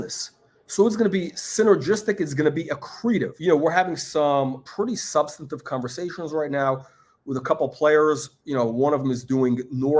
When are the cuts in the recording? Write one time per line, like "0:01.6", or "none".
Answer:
0:03.3
0:04.6